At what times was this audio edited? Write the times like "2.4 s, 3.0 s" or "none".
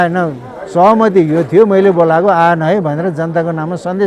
none